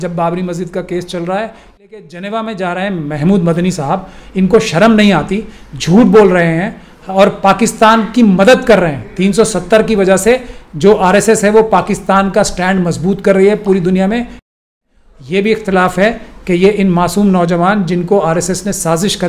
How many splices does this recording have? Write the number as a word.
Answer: two